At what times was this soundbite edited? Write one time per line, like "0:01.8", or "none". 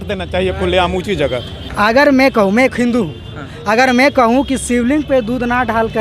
0:01.6